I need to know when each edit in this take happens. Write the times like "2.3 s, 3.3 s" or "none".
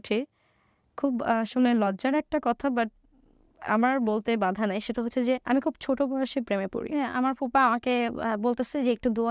7.0 s